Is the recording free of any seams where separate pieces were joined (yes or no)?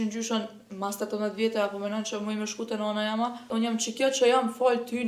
no